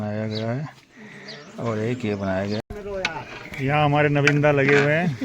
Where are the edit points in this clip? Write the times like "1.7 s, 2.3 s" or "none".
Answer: 2.6 s